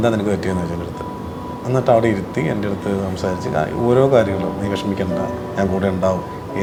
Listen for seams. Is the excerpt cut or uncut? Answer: uncut